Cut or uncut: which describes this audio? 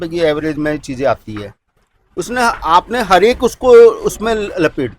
uncut